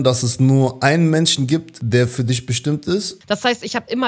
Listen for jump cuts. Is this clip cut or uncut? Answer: cut